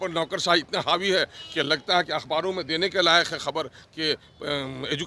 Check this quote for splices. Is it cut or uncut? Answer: uncut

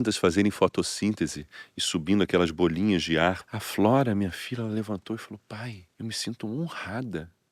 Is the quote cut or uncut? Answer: cut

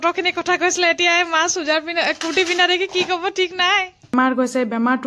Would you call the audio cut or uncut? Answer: cut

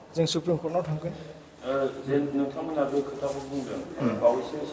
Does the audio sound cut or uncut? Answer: uncut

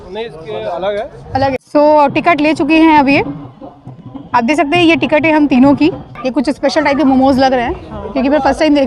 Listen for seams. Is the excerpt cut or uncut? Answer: cut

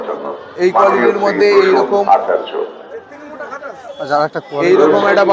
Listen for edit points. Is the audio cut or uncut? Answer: uncut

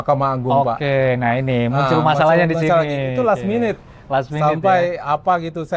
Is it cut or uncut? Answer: uncut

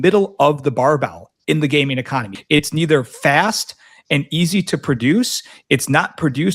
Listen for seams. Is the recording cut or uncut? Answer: cut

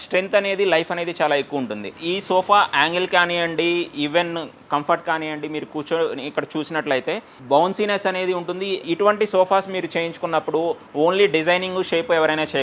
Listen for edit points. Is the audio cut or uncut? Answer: cut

